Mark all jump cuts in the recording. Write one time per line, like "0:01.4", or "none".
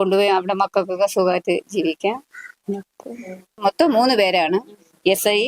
0:03.6